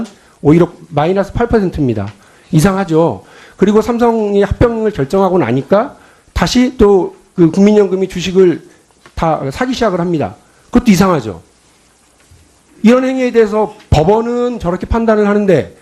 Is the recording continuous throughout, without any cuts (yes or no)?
yes